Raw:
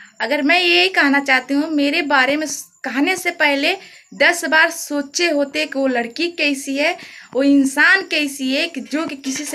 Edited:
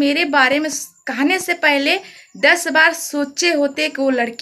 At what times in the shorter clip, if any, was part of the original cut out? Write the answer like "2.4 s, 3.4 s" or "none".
none